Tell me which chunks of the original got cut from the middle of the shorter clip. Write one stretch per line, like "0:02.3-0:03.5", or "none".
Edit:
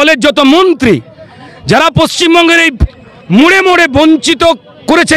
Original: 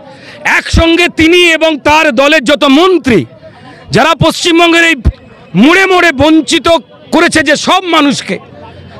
none